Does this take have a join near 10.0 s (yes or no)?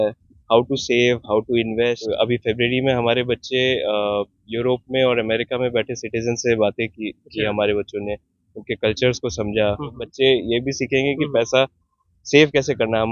yes